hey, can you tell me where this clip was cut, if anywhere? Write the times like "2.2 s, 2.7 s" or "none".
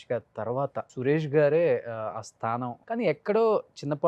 0.9 s, 2.8 s